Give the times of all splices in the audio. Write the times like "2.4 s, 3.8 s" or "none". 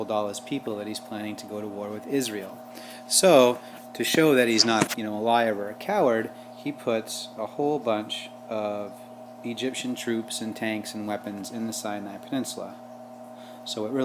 2.4 s